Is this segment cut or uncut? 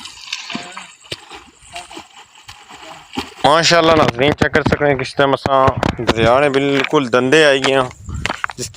cut